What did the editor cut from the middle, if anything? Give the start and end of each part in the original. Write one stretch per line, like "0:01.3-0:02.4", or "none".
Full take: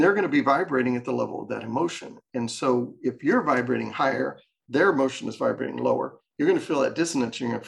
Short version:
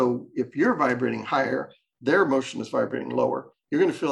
none